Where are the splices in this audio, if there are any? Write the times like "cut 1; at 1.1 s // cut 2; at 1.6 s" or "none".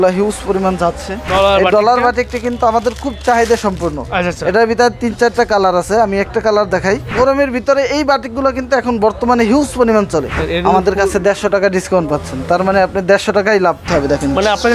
cut 1; at 1.1 s // cut 2; at 7.1 s // cut 3; at 10.4 s // cut 4; at 13.8 s